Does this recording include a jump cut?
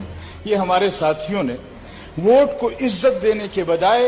no; 0 cuts

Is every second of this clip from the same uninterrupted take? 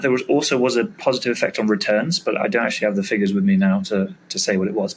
yes; 0 cuts

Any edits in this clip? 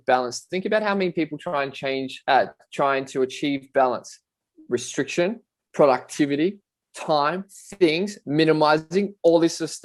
no; 0 cuts

